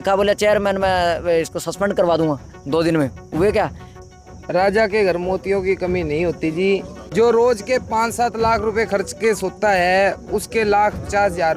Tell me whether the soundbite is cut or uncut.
cut